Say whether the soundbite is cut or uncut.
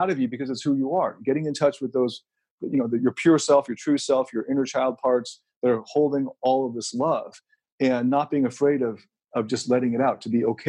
uncut